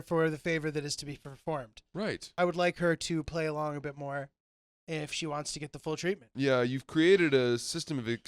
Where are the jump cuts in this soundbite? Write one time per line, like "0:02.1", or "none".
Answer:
0:02.4
0:06.3